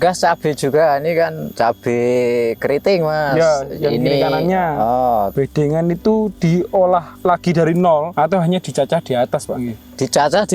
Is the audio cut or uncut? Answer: cut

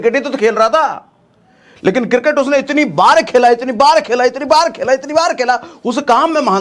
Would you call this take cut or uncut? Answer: uncut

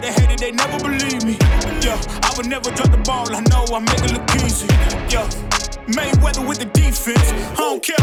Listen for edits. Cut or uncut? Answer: uncut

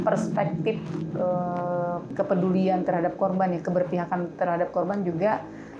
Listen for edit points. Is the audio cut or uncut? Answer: cut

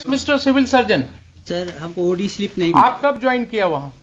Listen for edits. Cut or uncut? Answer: uncut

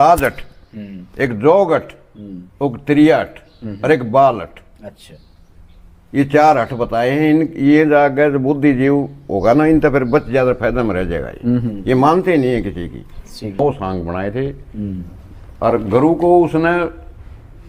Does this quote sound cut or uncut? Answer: cut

